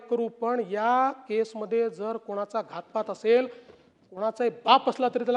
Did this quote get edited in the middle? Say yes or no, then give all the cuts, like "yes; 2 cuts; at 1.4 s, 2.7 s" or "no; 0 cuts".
no; 0 cuts